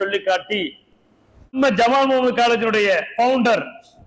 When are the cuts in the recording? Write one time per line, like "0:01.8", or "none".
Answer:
0:01.4